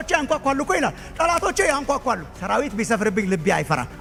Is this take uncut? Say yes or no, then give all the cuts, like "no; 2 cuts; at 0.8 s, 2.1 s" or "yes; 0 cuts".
yes; 0 cuts